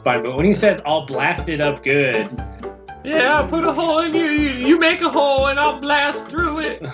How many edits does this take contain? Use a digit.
1